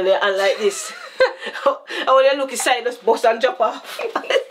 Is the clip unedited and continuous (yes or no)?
yes